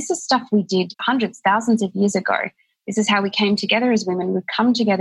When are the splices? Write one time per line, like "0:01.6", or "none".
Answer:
0:01.0